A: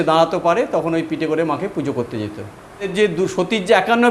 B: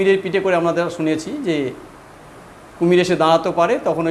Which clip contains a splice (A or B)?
A